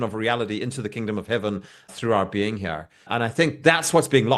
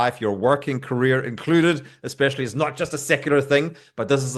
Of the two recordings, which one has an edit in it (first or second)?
first